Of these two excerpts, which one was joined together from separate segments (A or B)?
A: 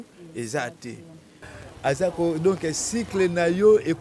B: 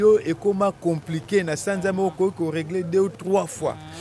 A